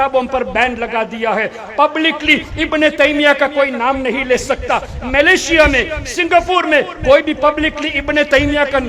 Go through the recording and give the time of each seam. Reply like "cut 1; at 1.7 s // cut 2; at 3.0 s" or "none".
none